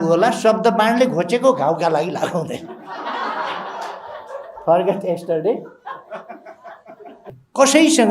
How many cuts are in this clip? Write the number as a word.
one